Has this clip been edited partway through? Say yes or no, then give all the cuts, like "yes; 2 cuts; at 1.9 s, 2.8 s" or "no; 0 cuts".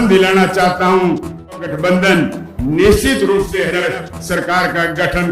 yes; 2 cuts; at 1.6 s, 3.6 s